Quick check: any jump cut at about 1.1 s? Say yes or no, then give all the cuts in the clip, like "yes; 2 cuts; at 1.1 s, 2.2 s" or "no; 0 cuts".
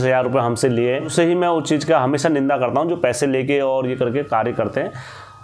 yes; 1 cut; at 1.1 s